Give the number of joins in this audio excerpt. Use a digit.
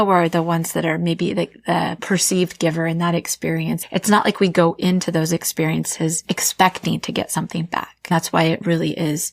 3